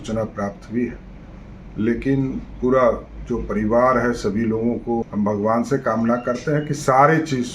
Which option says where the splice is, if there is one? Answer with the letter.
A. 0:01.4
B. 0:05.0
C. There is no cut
B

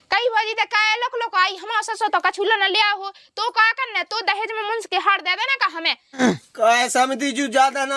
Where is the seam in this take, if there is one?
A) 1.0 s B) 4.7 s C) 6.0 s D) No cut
C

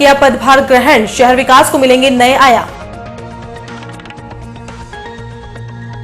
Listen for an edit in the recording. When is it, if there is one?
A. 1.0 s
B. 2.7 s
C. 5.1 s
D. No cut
B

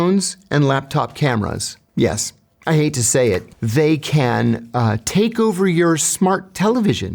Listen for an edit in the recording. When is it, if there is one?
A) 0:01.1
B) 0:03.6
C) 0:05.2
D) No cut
B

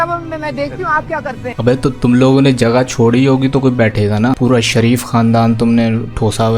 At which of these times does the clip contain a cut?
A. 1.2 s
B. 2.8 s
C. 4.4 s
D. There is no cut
C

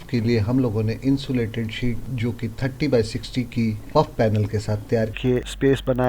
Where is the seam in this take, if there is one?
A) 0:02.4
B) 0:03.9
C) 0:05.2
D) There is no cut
C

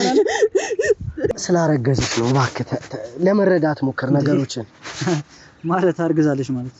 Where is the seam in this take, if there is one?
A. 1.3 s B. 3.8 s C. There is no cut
A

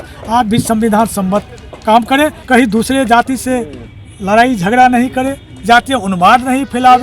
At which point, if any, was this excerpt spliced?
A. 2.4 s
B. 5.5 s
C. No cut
A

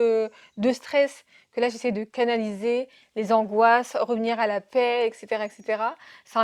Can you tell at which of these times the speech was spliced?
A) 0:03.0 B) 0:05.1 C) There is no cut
C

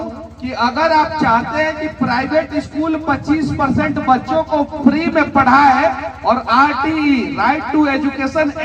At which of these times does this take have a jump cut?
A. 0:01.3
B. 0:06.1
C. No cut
C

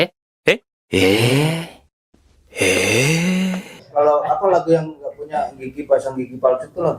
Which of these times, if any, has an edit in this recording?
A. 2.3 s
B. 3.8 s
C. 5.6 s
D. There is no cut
B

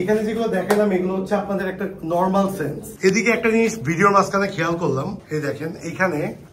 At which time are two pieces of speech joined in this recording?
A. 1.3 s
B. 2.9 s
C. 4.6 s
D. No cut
B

